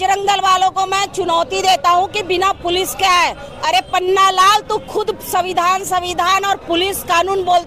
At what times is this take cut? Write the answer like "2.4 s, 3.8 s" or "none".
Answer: none